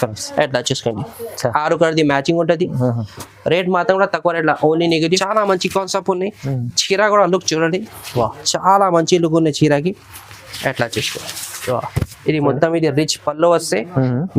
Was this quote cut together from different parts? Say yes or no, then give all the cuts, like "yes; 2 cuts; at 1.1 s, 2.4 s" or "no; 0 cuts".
yes; 1 cut; at 5.2 s